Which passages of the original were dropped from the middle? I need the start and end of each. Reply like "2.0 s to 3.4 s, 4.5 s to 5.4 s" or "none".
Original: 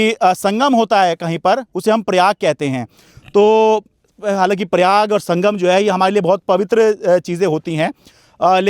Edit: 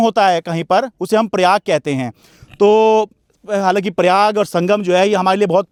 none